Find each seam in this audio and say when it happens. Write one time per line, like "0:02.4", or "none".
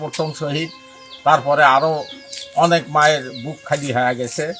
none